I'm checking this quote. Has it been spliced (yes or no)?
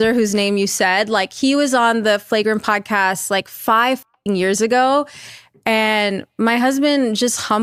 no